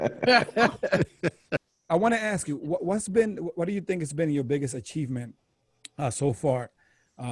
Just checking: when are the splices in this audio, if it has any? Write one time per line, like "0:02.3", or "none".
0:01.7